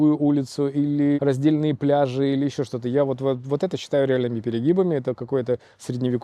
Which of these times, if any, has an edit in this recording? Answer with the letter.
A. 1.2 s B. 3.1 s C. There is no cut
A